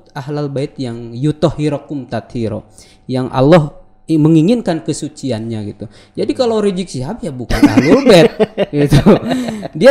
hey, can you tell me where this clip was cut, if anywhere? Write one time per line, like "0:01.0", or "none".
none